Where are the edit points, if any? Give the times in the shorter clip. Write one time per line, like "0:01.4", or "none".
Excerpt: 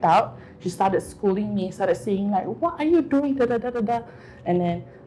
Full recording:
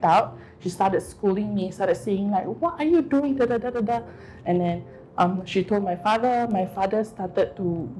none